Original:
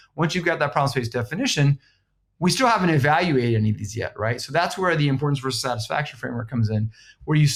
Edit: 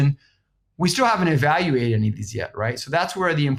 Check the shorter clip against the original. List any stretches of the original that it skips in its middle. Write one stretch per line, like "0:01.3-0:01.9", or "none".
none